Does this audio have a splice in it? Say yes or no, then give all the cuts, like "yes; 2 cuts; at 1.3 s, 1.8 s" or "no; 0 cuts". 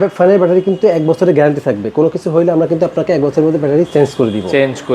no; 0 cuts